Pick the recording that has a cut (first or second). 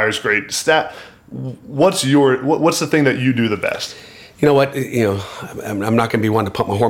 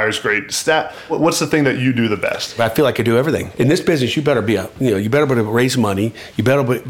second